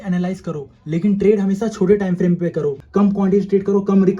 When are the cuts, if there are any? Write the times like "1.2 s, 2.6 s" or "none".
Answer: 2.8 s